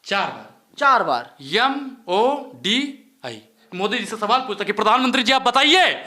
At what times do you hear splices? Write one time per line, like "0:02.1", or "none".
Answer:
0:03.6